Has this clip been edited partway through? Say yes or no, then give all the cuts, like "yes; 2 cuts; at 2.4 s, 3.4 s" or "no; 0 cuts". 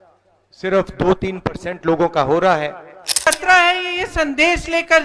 yes; 1 cut; at 3.3 s